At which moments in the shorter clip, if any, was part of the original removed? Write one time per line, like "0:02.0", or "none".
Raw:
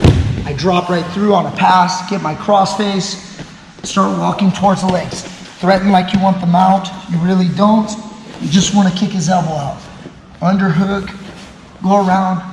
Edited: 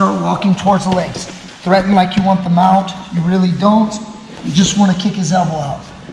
none